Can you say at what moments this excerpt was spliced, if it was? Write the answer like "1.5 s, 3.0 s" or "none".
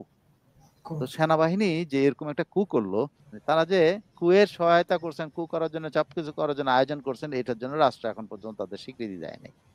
3.3 s